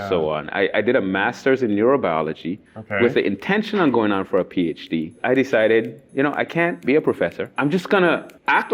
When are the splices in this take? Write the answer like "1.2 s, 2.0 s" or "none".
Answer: 5.1 s, 7.1 s